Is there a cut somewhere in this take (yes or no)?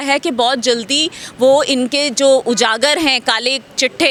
no